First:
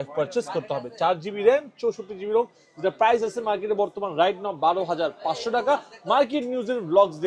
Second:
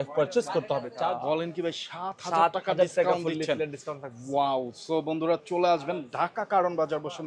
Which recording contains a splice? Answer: second; 1 cut; at 0.9 s

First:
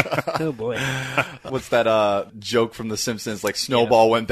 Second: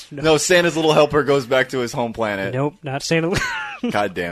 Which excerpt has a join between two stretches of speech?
first; 2 cuts; at 1.5 s, 2.4 s

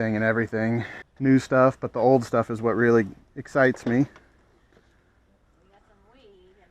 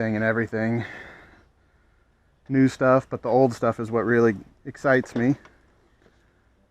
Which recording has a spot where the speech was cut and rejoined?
first; 1 cut; at 1.0 s

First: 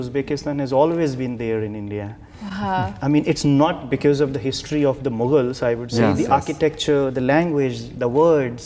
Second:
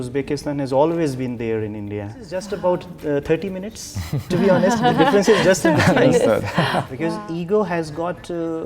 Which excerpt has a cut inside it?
second; 2 cuts; at 2.4 s, 6.9 s

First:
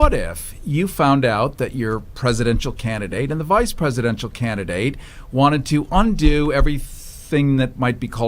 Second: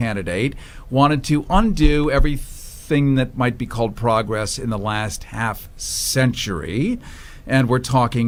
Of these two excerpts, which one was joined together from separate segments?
first; 1 cut; at 1.5 s

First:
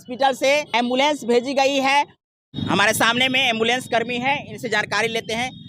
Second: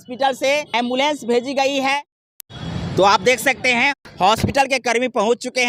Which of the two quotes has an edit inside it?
first; 1 cut; at 2.5 s

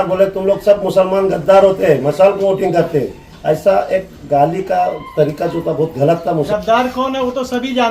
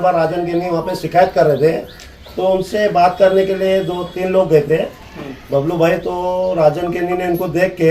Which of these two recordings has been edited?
first; 1 cut; at 6.5 s

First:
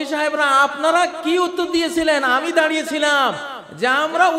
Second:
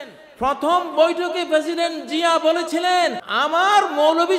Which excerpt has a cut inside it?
second; 1 cut; at 3.2 s

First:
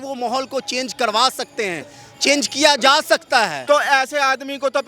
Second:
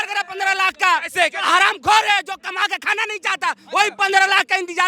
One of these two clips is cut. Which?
first; 1 cut; at 3.6 s

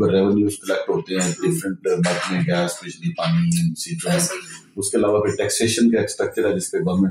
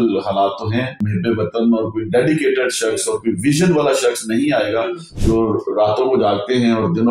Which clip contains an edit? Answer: second; 2 cuts; at 1.0 s, 5.1 s

